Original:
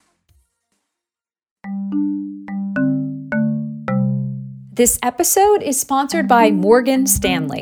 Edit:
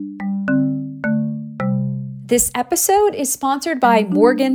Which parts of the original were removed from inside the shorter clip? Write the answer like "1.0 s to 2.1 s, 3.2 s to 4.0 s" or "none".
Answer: 4.4 s to 4.6 s